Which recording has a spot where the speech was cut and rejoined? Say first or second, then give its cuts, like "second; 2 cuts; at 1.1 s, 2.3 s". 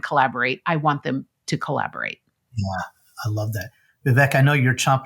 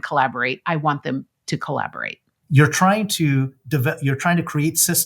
second; 1 cut; at 2.3 s